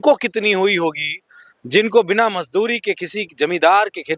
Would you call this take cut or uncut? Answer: uncut